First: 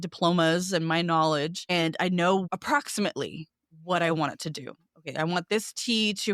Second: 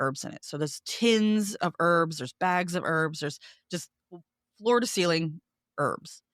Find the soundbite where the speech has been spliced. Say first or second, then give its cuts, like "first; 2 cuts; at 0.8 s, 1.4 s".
first; 2 cuts; at 1.6 s, 2.5 s